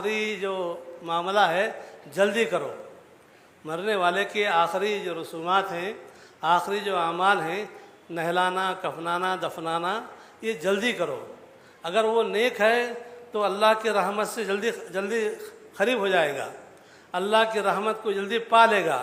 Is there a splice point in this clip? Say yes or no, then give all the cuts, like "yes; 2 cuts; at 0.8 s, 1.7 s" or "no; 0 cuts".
no; 0 cuts